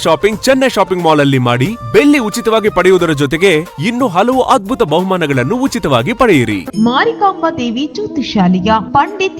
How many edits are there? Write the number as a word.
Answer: one